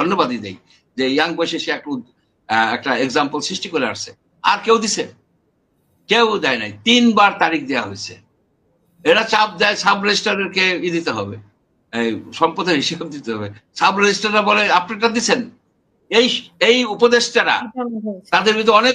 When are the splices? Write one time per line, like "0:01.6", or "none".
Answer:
none